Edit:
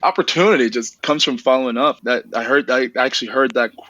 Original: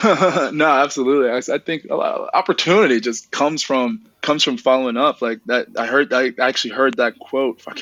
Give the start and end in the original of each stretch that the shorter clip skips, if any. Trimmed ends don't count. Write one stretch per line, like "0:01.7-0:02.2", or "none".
0:03.2-0:04.1
0:05.2-0:05.4